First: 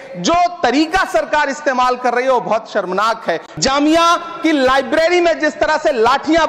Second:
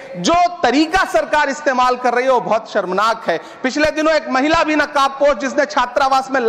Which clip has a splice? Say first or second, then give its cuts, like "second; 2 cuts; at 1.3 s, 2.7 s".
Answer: first; 1 cut; at 3.5 s